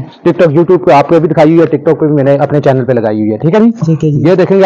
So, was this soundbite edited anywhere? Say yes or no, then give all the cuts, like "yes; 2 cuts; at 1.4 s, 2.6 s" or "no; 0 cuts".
no; 0 cuts